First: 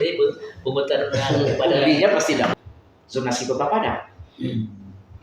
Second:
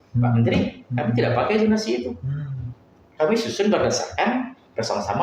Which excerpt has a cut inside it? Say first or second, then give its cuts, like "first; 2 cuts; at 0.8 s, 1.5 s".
first; 1 cut; at 2.5 s